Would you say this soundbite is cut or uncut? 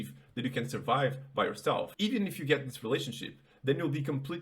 cut